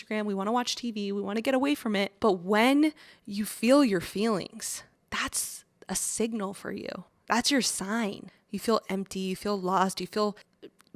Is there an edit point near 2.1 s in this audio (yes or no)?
yes